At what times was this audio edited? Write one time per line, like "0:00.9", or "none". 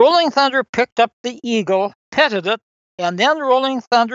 0:02.0
0:02.7